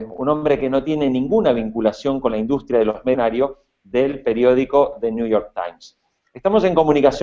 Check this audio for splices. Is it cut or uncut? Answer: uncut